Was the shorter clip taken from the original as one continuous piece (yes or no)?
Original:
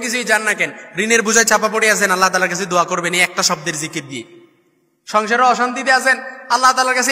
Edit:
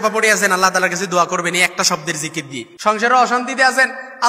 no